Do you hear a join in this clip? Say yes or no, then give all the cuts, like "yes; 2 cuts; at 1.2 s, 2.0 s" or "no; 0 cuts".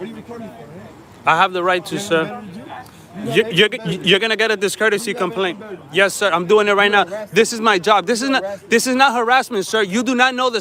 no; 0 cuts